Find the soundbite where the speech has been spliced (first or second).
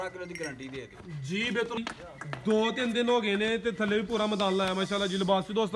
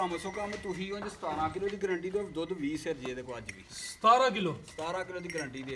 first